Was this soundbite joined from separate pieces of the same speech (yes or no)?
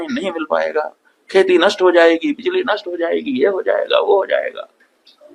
no